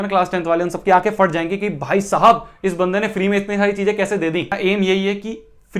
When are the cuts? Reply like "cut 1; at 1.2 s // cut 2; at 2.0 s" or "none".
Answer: cut 1; at 4.6 s